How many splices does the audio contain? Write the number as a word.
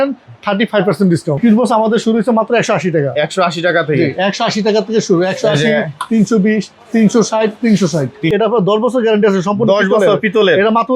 two